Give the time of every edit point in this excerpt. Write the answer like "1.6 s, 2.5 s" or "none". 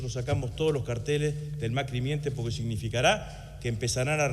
none